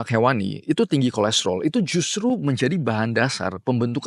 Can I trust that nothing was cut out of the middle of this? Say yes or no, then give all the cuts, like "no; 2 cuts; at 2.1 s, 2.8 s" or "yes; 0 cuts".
yes; 0 cuts